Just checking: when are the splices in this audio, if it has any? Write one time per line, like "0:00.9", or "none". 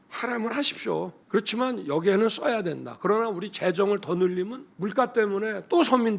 0:01.2
0:04.6

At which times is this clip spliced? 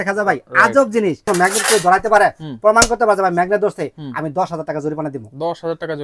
0:01.2

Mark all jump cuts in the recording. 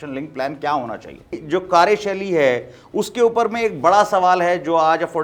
0:01.4

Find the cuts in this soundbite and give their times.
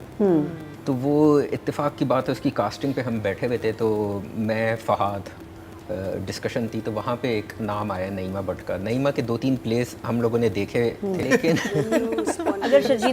0:11.2

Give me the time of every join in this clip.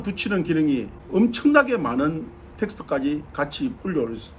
0:01.0

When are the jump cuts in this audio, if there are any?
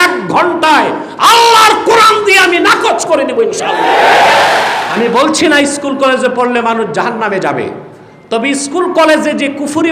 0:04.7

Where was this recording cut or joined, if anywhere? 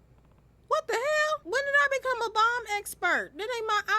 0:01.4

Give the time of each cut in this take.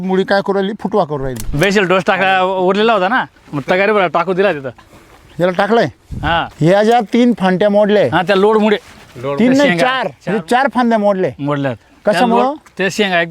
0:01.4
0:06.5
0:10.1

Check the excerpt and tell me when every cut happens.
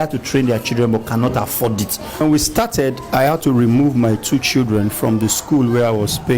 0:02.2

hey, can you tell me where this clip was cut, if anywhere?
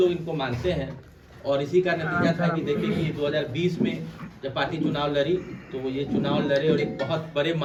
none

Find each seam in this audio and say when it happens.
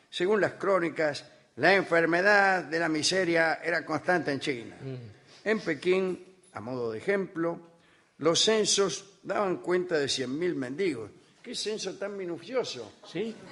0:04.4

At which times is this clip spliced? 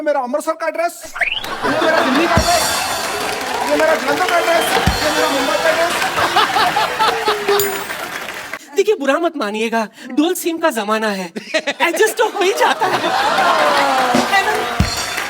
0:08.5

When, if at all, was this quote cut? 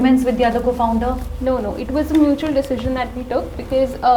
none

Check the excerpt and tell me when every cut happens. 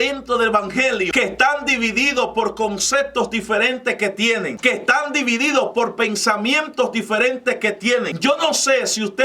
0:01.1
0:04.5
0:08.1

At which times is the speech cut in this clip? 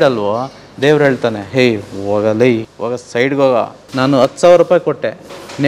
0:02.7
0:03.8

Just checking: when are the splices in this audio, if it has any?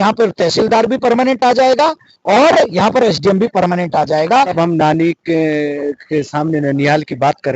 0:04.5

